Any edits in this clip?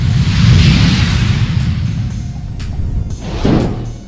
no; 0 cuts

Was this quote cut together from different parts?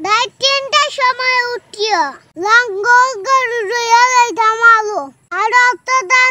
yes; 1 cut; at 5.2 s

